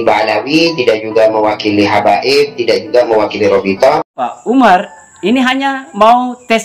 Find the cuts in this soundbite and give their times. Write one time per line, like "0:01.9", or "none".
0:04.3